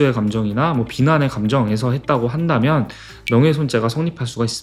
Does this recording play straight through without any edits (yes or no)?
yes